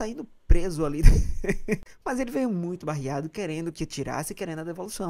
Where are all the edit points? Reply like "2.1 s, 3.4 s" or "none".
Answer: 1.9 s